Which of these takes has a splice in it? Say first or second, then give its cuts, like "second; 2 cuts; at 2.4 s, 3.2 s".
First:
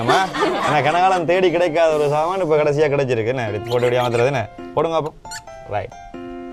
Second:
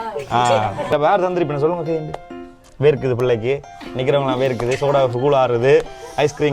second; 1 cut; at 0.9 s